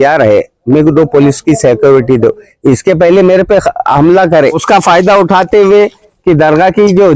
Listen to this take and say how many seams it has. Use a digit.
1